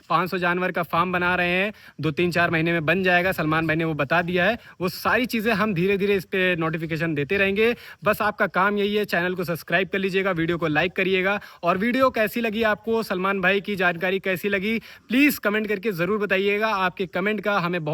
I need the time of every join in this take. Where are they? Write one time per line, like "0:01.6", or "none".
none

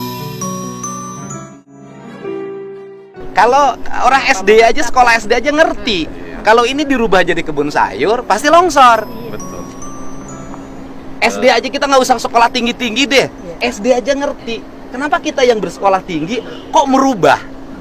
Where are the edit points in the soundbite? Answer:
0:01.4

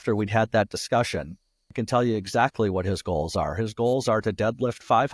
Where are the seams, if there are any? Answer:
0:01.8

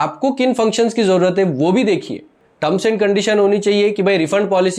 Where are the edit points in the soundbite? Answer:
0:02.5

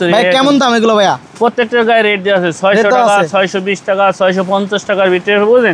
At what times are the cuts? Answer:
none

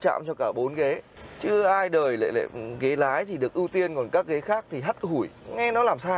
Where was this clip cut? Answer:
0:01.1

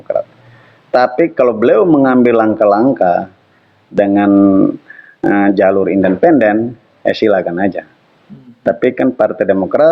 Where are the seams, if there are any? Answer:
none

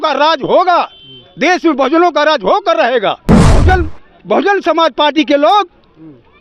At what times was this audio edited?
0:03.6

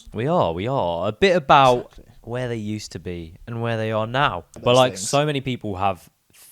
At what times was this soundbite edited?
0:04.6

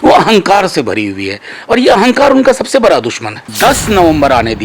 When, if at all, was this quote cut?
0:03.5

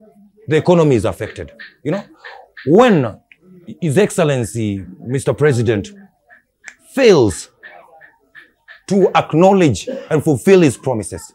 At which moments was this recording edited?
none

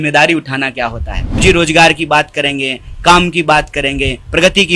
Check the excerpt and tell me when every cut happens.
0:01.4

